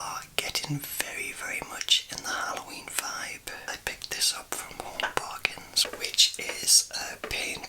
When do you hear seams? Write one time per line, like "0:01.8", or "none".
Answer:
0:03.7
0:05.8